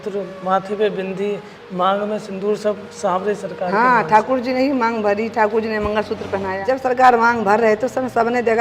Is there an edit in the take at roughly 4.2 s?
no; 1 cut; at 6.6 s

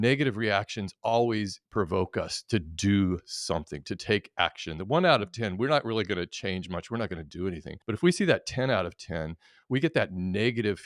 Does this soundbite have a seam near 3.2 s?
no; 2 cuts; at 1.6 s, 7.7 s

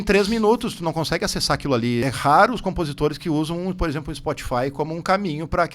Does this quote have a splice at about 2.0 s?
yes; 1 cut; at 2.0 s

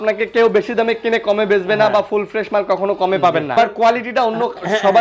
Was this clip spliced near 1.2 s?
no; 1 cut; at 3.5 s

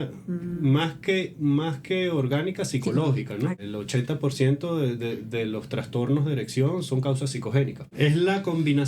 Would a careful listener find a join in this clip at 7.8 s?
yes; 2 cuts; at 3.6 s, 7.8 s

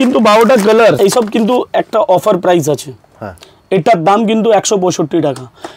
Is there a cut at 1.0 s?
yes; 1 cut; at 1.0 s

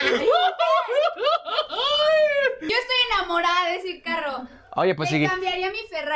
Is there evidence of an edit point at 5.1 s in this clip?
no; 1 cut; at 2.6 s

